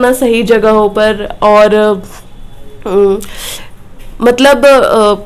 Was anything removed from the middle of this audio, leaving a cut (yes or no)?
no